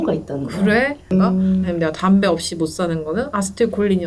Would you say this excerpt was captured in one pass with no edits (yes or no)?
no